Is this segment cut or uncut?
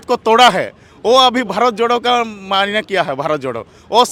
uncut